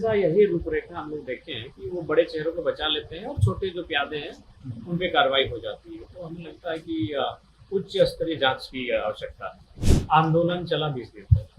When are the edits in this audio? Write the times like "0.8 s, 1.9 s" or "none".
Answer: 9.8 s